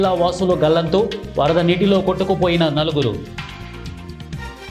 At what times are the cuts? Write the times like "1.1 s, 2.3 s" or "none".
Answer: 3.3 s